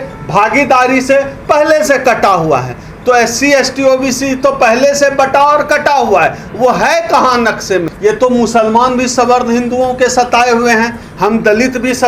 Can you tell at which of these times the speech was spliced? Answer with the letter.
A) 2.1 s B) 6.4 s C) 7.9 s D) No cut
C